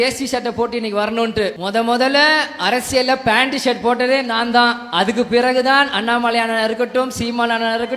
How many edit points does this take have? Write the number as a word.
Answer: one